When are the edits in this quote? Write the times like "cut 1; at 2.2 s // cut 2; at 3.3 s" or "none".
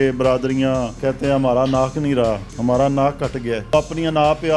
cut 1; at 1.0 s // cut 2; at 2.5 s // cut 3; at 3.7 s